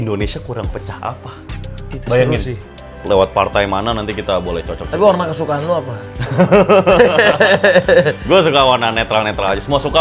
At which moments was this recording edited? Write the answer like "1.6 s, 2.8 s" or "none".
2.9 s